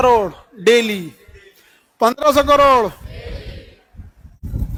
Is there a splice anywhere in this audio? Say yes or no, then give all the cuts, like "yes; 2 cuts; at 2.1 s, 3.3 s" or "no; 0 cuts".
no; 0 cuts